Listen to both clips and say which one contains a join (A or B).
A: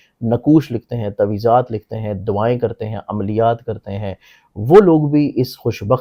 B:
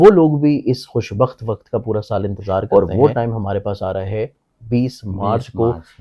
B